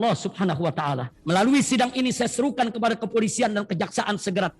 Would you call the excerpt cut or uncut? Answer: cut